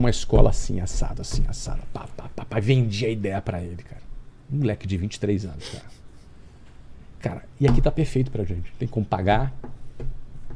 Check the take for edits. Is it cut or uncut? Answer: uncut